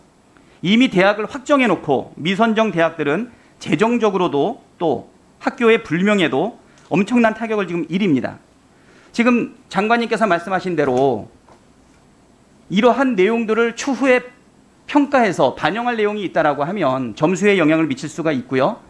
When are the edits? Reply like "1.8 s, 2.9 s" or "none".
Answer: 7.9 s